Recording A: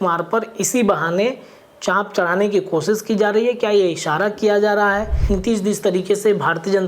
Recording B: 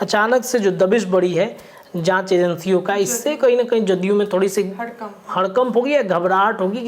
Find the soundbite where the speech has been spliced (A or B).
A